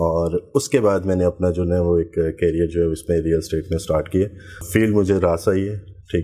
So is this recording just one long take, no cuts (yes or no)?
no